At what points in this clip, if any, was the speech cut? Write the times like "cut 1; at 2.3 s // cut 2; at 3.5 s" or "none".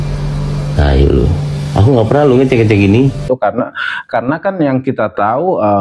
cut 1; at 3.2 s